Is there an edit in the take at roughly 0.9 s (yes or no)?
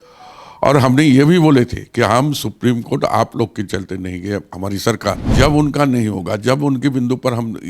no